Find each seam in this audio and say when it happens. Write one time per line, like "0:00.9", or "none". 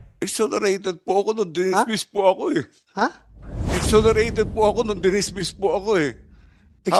none